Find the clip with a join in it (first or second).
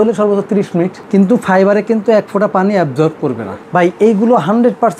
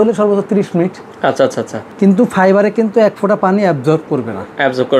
first